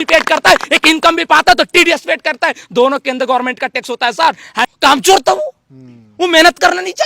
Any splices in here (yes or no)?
yes